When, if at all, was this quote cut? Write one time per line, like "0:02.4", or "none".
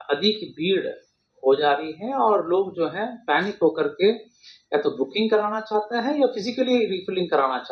none